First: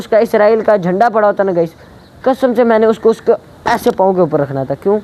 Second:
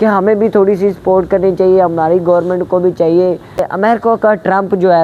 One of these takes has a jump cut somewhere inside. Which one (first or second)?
second